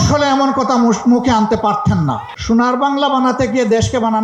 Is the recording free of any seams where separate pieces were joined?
no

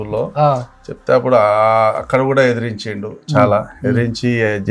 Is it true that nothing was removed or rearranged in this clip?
yes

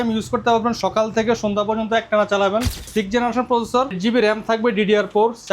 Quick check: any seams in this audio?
yes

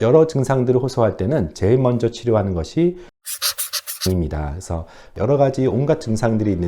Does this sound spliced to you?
yes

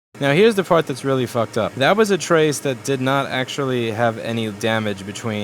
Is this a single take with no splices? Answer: no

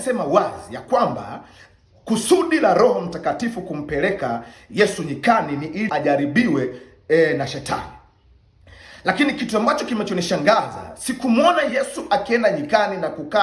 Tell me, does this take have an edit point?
yes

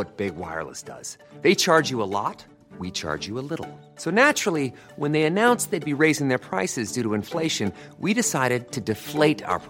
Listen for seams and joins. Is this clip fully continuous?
yes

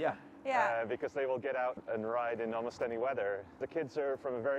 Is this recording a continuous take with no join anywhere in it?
no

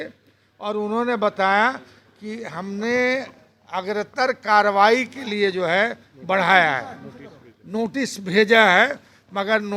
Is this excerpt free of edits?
yes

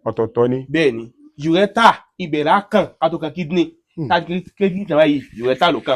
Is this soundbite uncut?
yes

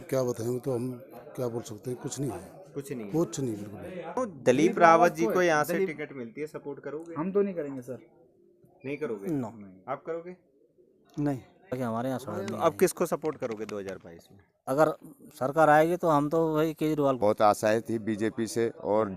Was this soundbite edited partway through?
yes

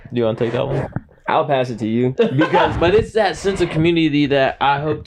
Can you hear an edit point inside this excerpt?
yes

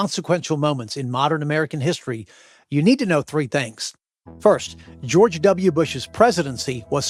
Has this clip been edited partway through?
no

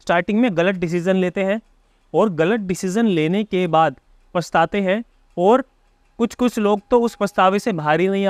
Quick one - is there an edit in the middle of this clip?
no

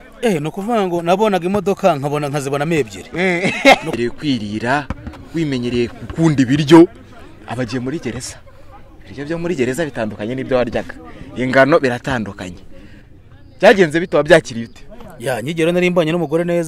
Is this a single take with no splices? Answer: no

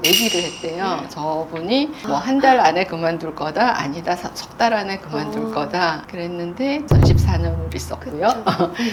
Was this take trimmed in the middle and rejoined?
no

